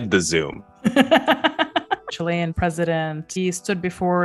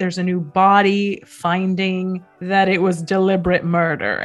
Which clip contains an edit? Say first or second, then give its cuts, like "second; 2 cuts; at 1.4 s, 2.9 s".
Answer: first; 2 cuts; at 2.4 s, 3.4 s